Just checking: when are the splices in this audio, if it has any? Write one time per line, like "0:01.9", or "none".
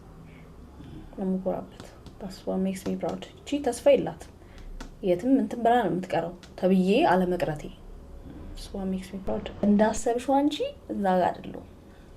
0:09.6